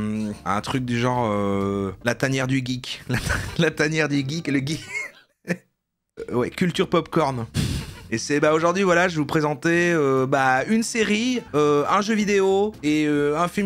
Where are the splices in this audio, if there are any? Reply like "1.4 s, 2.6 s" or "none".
none